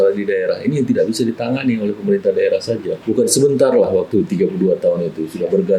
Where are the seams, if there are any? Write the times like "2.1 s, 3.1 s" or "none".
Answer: 3.0 s